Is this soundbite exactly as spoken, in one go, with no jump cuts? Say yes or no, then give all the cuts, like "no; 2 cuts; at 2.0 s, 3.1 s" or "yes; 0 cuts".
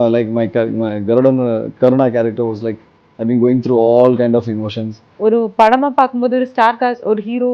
no; 1 cut; at 5.2 s